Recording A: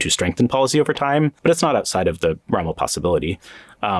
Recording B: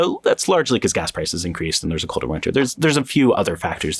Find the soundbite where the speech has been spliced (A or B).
A